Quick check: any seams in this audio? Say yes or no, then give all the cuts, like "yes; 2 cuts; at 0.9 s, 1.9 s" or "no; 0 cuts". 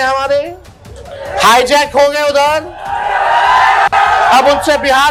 no; 0 cuts